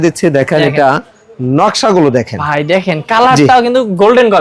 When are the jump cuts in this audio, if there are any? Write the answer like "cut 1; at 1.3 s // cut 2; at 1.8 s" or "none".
none